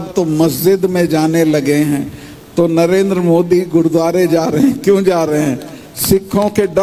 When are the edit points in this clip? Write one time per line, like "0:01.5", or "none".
none